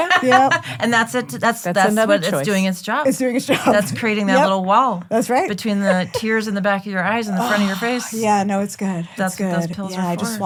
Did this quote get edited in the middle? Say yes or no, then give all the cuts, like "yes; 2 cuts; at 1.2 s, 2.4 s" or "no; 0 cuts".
no; 0 cuts